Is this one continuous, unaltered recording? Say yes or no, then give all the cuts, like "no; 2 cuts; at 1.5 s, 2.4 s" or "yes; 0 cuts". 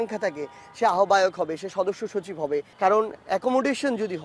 no; 1 cut; at 2.7 s